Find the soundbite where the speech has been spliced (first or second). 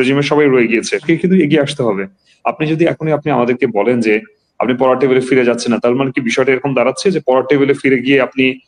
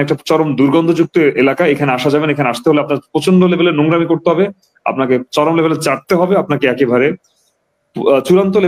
first